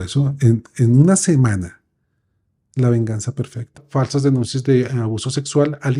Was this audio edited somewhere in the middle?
yes; 1 cut; at 3.8 s

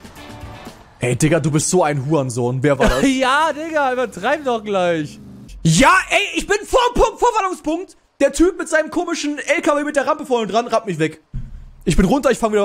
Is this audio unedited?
no; 1 cut; at 2.8 s

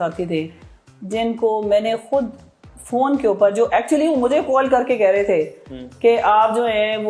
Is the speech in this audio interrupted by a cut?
no; 0 cuts

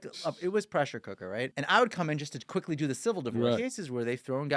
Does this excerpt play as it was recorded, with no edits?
no; 2 cuts; at 1.6 s, 3.6 s

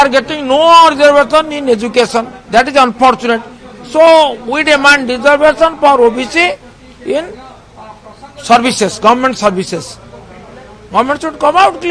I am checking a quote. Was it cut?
no; 0 cuts

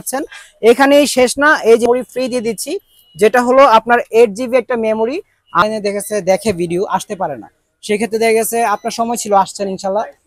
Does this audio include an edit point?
yes; 2 cuts; at 1.8 s, 5.6 s

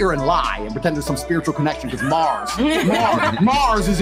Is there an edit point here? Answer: no; 0 cuts

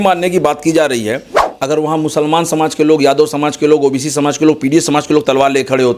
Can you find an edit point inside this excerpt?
yes; 1 cut; at 1.4 s

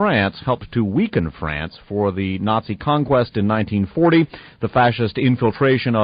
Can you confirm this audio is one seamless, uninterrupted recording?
yes; 0 cuts

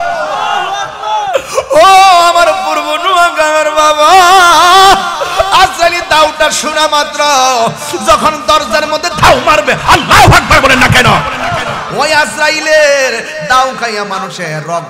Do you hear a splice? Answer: no; 0 cuts

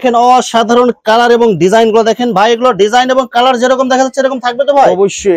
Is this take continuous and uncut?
yes; 0 cuts

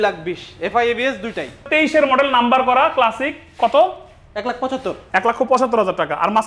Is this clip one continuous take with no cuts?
no; 1 cut; at 1.7 s

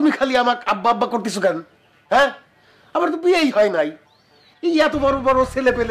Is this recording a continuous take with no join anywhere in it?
yes; 0 cuts

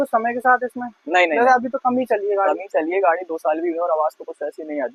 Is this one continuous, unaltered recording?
yes; 0 cuts

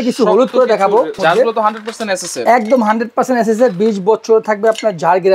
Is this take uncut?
no; 1 cut; at 1.2 s

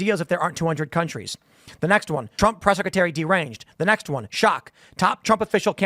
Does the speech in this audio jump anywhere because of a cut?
yes; 1 cut; at 2.3 s

